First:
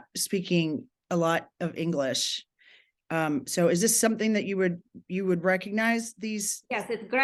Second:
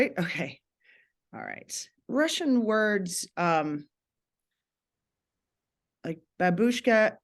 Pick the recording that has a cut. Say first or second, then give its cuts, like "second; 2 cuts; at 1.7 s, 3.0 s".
second; 1 cut; at 2.0 s